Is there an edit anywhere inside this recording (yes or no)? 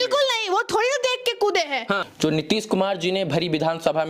yes